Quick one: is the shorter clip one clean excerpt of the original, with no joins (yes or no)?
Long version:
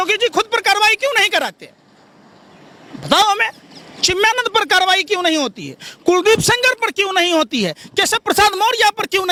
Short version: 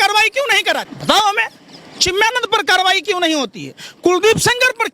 no